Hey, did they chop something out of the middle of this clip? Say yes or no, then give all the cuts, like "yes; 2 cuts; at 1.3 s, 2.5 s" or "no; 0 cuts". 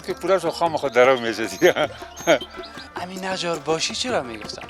yes; 1 cut; at 2.9 s